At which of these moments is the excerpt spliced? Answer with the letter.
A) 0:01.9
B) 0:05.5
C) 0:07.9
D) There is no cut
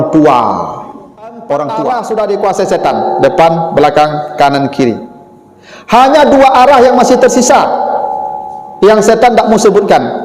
A